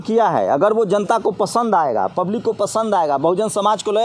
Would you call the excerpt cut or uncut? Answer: uncut